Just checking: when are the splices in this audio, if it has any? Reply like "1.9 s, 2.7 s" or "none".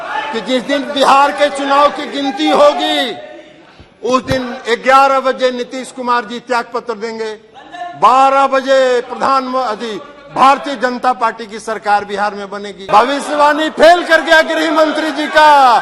12.8 s